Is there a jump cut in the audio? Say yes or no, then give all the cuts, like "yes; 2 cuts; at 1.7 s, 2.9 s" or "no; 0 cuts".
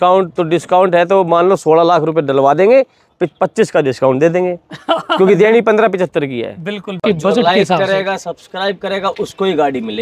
yes; 1 cut; at 6.9 s